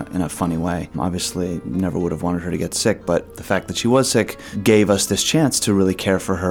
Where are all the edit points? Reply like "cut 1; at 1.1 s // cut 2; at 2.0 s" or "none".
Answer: cut 1; at 0.9 s // cut 2; at 3.3 s // cut 3; at 4.4 s